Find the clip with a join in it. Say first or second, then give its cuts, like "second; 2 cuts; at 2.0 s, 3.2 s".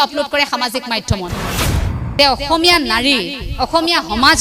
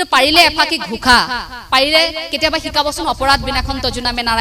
first; 1 cut; at 1.5 s